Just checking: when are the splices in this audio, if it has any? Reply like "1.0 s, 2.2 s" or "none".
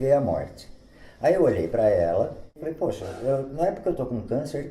2.7 s